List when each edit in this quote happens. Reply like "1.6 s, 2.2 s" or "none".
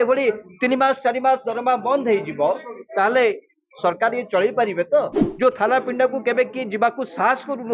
5.2 s